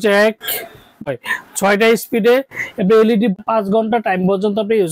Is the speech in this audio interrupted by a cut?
yes; 2 cuts; at 0.9 s, 3.4 s

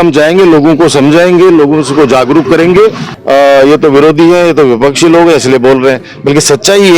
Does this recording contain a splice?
yes; 1 cut; at 3.1 s

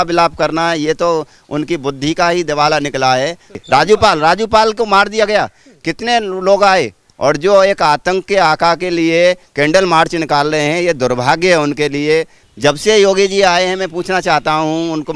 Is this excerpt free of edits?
no; 2 cuts; at 3.6 s, 12.4 s

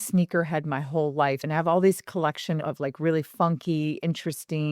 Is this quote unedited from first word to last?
no; 2 cuts; at 1.4 s, 2.6 s

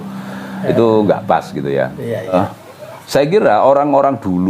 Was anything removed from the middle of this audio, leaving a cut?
yes; 1 cut; at 2.3 s

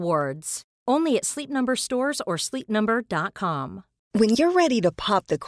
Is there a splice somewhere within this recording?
yes; 1 cut; at 4.0 s

